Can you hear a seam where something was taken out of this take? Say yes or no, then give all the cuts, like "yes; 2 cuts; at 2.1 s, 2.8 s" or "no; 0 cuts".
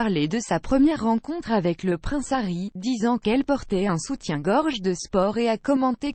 no; 0 cuts